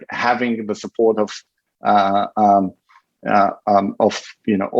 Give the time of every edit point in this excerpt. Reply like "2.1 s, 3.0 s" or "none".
none